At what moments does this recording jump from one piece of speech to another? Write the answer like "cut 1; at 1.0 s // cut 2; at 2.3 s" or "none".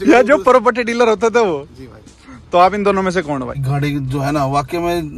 cut 1; at 3.6 s